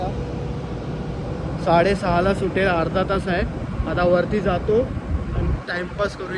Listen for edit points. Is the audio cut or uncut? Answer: uncut